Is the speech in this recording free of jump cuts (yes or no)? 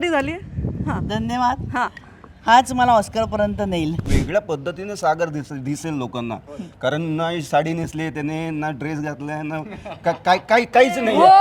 no